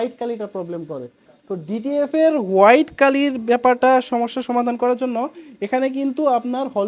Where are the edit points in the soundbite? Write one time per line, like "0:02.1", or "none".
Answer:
none